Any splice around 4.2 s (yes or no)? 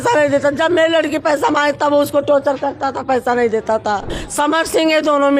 yes